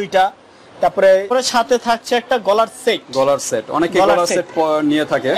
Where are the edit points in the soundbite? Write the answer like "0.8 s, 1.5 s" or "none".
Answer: 1.3 s